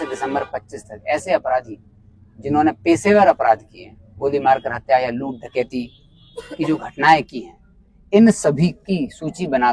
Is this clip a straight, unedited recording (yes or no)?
yes